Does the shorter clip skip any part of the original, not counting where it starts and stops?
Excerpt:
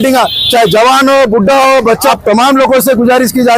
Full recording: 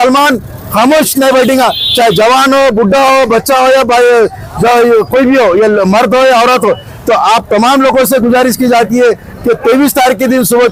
yes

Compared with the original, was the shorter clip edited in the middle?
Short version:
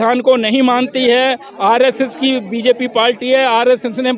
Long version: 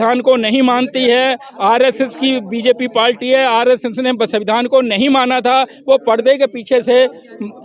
no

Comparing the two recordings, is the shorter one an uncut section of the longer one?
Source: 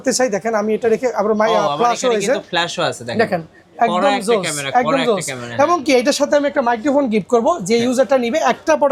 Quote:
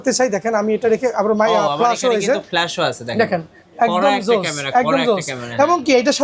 yes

